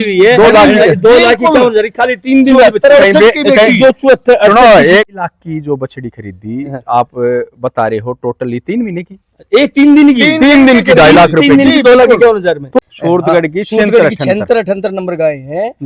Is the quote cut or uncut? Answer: cut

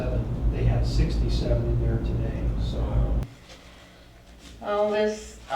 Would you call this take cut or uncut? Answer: cut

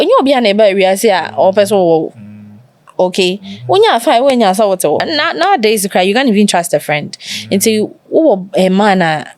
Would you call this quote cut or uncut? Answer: cut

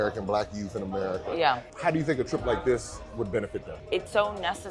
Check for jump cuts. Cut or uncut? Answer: cut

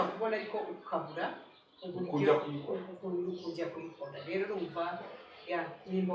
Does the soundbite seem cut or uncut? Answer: uncut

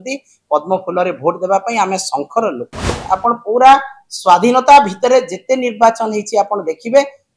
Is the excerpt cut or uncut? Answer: cut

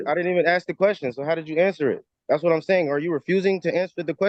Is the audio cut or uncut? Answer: uncut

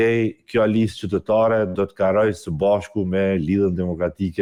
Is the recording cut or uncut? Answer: uncut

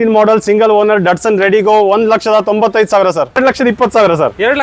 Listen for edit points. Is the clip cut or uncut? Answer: cut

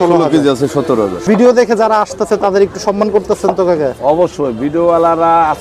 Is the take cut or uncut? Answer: cut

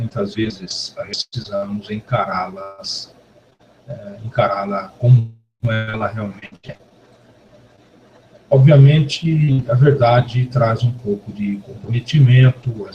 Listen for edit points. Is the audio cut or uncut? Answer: cut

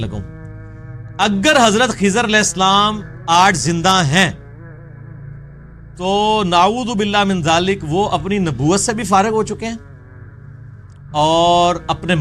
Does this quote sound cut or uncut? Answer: uncut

